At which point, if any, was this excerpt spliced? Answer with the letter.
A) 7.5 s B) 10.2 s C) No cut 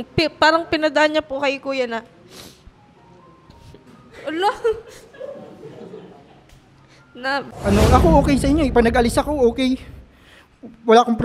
A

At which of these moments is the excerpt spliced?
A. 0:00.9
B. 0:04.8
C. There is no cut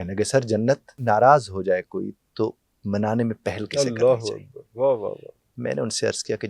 A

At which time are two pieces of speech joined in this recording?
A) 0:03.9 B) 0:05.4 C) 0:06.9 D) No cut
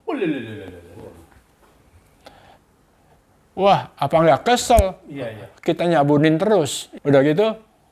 C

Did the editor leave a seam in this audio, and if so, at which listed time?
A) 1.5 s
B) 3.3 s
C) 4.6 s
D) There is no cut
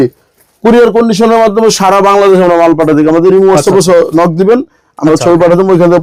D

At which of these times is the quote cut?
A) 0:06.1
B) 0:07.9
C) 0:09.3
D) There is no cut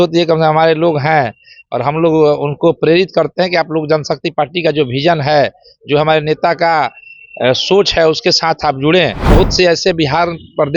C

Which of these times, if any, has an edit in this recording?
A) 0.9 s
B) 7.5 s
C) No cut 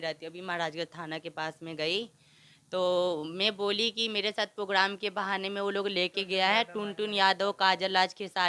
C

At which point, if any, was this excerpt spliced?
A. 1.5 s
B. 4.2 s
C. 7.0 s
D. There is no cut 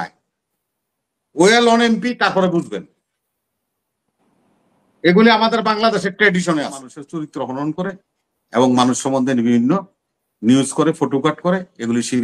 C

